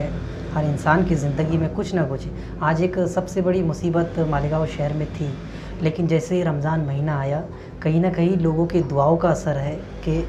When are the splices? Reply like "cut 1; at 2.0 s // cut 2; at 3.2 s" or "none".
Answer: none

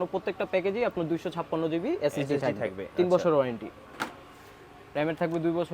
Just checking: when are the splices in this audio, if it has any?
none

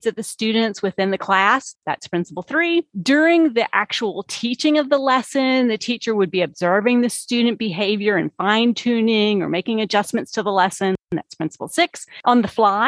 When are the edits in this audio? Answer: cut 1; at 1.7 s // cut 2; at 11.0 s

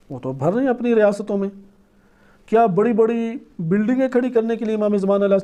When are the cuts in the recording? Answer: none

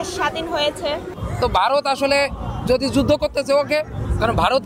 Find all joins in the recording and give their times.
cut 1; at 1.2 s

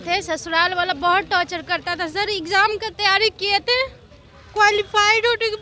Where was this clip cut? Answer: none

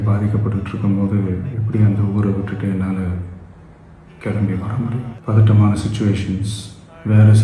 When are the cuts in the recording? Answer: cut 1; at 5.1 s

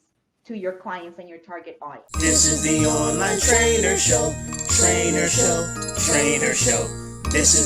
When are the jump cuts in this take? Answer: cut 1; at 2.0 s

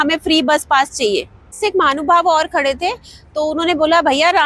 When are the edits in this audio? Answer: cut 1; at 1.6 s

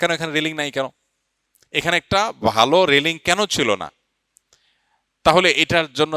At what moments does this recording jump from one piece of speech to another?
none

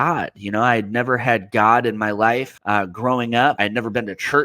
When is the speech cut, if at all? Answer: cut 1; at 2.5 s // cut 2; at 3.6 s

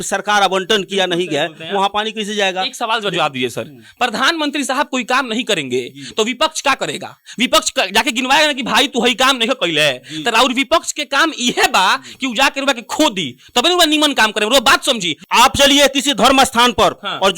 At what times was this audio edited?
cut 1; at 15.1 s

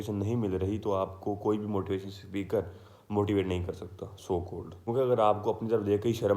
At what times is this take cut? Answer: cut 1; at 4.7 s

